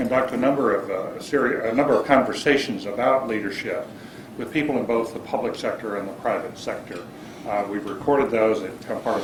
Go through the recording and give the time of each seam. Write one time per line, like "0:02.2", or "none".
none